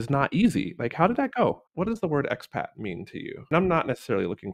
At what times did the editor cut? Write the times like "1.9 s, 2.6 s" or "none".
1.7 s, 3.4 s